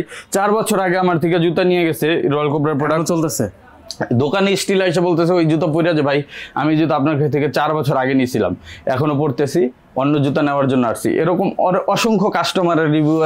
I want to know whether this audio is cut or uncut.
uncut